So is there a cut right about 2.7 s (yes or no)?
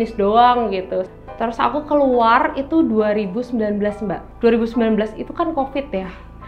no